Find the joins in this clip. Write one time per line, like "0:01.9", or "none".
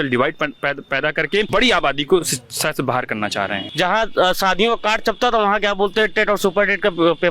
0:01.5
0:03.6